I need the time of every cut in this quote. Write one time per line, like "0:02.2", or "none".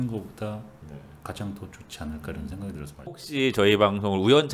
0:03.2

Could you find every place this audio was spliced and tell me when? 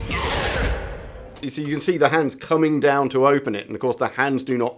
0:01.3

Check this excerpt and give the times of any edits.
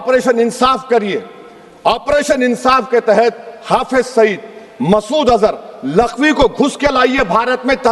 none

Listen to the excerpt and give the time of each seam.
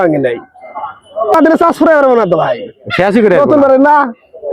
0:01.3

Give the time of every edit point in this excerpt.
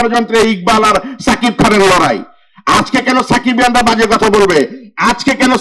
none

